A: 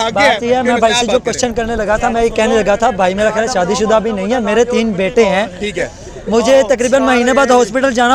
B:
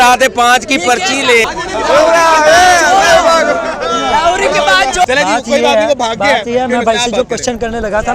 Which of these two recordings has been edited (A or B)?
B